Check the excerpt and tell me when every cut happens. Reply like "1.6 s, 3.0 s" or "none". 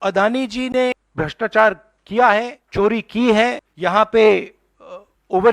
1.0 s, 2.6 s, 3.7 s